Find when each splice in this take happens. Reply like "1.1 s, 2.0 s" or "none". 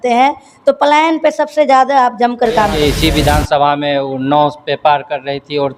2.8 s